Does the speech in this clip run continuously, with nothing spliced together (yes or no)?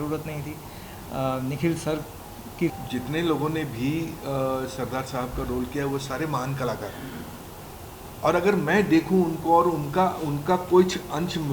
no